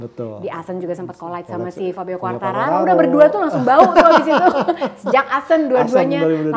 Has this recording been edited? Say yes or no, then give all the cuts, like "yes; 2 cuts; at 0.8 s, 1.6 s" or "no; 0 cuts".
no; 0 cuts